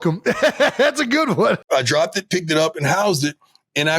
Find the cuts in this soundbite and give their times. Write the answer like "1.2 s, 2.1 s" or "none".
1.7 s